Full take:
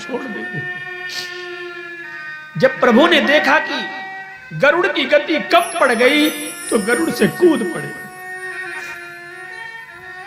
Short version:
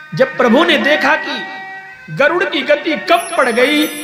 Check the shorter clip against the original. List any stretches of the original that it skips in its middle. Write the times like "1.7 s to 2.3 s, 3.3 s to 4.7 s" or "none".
none

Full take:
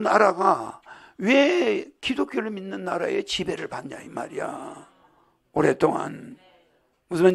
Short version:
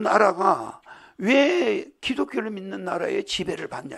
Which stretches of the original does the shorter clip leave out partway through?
none

